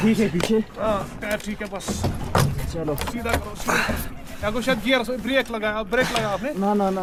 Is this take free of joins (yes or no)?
yes